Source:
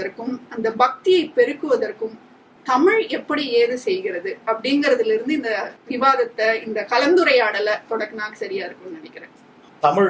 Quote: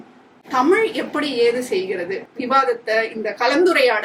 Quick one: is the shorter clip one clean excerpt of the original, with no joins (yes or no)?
no